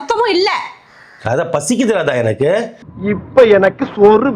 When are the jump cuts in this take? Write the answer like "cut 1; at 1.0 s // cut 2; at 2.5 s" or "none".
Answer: none